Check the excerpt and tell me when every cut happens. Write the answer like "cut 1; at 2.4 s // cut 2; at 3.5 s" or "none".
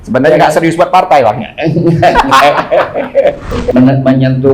cut 1; at 3.5 s

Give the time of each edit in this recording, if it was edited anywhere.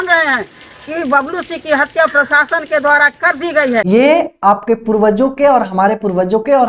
cut 1; at 3.8 s

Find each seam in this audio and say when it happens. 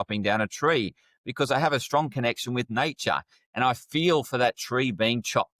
none

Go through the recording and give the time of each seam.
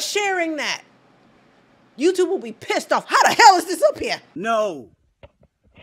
cut 1; at 4.3 s

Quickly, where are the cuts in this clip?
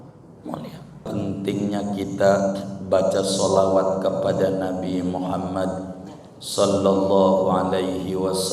cut 1; at 1.1 s

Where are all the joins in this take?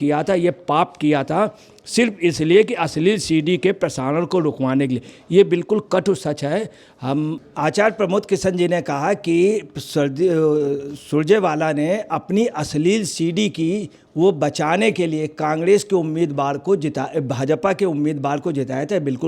none

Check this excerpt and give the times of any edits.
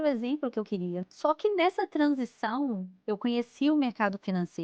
cut 1; at 1.0 s // cut 2; at 2.9 s

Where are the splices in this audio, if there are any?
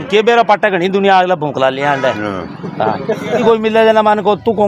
cut 1; at 3.4 s

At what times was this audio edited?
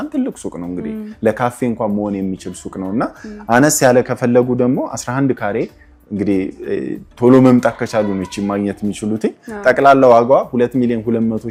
none

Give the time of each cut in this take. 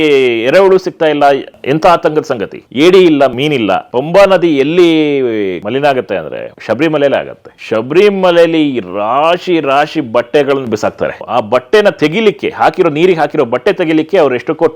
cut 1; at 1.5 s // cut 2; at 3.5 s // cut 3; at 5.6 s

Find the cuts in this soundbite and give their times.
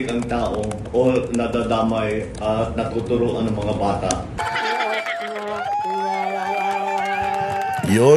cut 1; at 4.4 s

